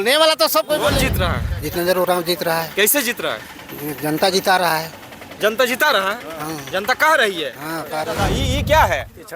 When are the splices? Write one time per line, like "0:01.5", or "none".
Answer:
0:01.1
0:08.3